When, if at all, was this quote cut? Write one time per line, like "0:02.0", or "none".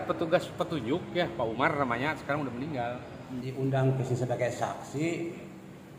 0:03.5